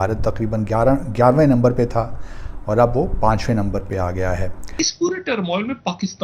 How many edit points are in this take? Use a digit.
1